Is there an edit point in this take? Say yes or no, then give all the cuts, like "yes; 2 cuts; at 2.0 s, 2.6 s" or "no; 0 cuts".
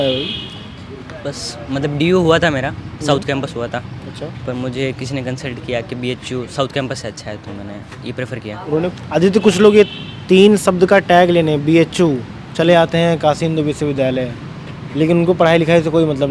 yes; 1 cut; at 8.9 s